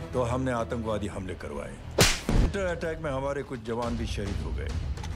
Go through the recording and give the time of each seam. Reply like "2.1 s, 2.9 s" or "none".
2.5 s

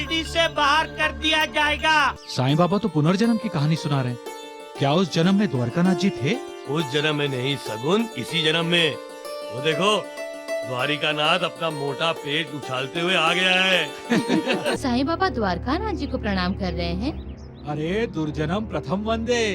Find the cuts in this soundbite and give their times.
2.2 s, 14.8 s

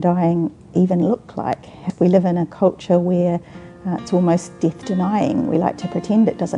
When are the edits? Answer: 1.8 s

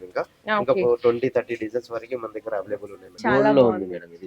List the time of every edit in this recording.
3.2 s

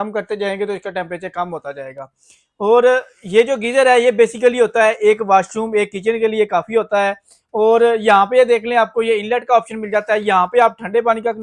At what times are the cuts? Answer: none

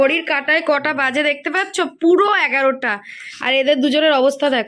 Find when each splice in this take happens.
none

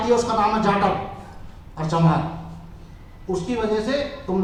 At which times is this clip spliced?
none

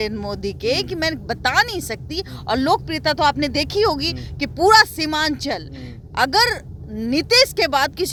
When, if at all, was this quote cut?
none

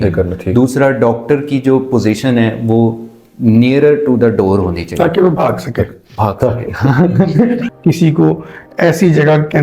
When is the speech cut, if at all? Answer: 7.7 s

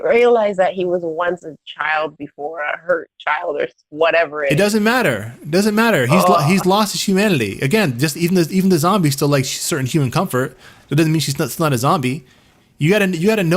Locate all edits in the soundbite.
none

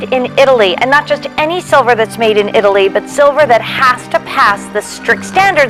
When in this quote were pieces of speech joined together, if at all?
none

